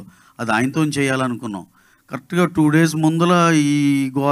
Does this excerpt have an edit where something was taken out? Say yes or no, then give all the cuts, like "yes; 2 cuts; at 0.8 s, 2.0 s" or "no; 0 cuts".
no; 0 cuts